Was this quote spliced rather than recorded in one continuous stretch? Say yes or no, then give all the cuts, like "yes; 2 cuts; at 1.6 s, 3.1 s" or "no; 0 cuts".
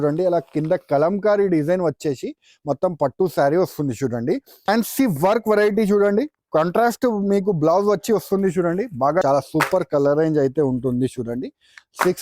yes; 2 cuts; at 4.7 s, 9.2 s